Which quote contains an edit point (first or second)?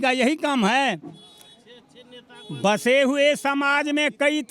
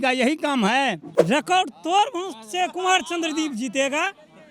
second